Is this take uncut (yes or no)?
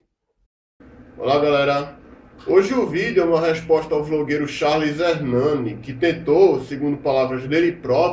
no